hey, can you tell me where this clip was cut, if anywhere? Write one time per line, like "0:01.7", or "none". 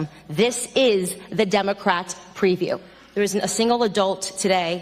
0:03.0